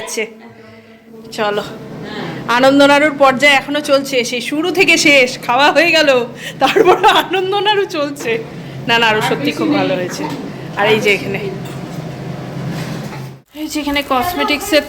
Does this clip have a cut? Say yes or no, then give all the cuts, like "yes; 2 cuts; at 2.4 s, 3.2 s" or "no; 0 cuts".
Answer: yes; 1 cut; at 13.4 s